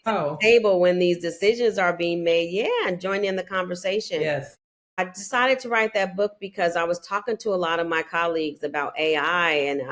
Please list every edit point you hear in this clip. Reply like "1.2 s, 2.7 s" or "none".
4.2 s